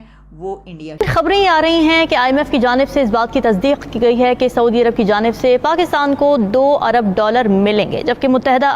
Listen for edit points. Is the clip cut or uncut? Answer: cut